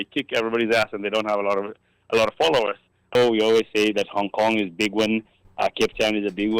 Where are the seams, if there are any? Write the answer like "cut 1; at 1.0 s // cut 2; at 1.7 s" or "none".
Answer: cut 1; at 3.1 s